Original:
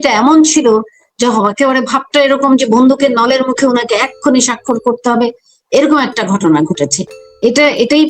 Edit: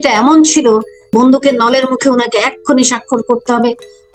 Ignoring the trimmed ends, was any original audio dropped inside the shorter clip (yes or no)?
yes